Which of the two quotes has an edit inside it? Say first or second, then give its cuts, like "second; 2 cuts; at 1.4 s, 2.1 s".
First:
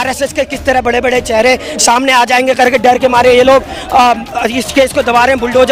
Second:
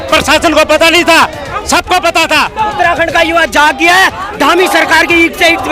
second; 1 cut; at 2.7 s